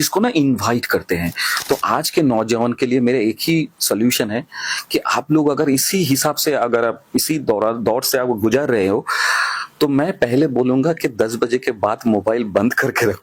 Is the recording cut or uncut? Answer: uncut